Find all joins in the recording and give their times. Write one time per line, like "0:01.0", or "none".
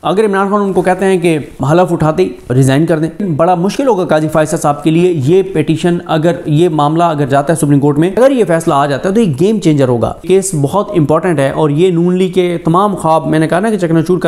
0:01.6
0:02.5
0:03.2
0:08.2
0:10.2